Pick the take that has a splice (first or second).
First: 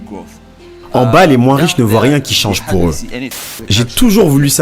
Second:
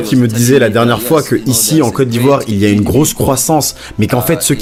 first